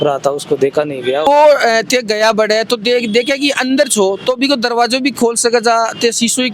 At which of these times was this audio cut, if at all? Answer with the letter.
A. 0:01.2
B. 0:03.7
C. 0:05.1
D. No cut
D